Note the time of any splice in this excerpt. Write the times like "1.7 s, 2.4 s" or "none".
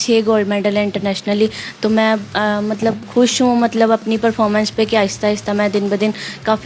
none